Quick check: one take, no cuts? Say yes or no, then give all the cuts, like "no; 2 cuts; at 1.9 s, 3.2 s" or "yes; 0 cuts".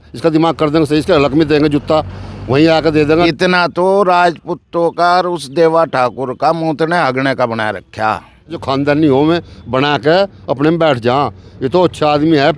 no; 2 cuts; at 3.3 s, 8.6 s